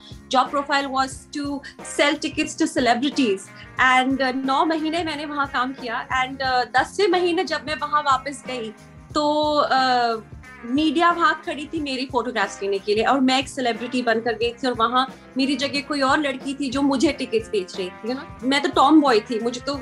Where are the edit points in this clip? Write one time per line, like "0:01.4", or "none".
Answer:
0:18.1

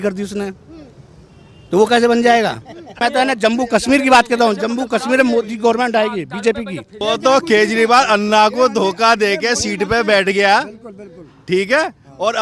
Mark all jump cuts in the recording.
0:02.9
0:06.9

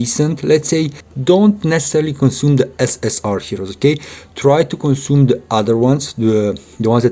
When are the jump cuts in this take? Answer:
0:01.1

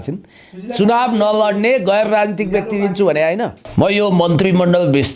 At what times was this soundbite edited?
0:03.6

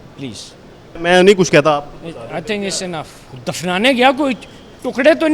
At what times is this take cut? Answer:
0:00.9
0:03.2

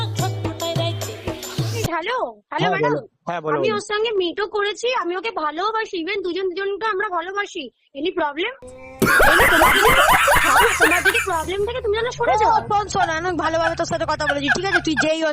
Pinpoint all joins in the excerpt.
0:01.8

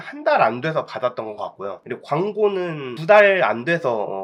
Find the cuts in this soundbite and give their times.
none

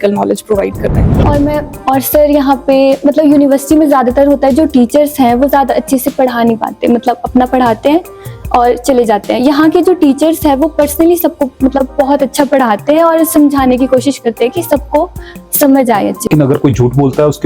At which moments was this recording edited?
0:01.0
0:16.3

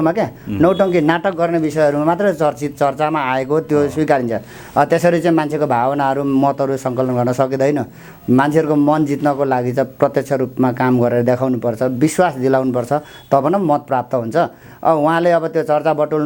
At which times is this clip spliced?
none

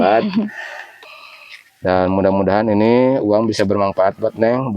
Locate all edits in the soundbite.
0:01.0

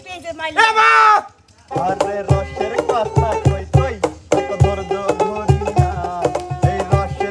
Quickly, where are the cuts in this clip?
0:01.7

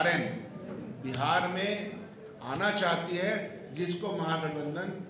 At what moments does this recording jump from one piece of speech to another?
none

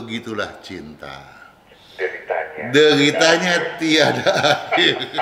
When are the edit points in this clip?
none

